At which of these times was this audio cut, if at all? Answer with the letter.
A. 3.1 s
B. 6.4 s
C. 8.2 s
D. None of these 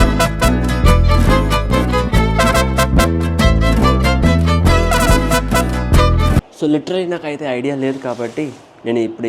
B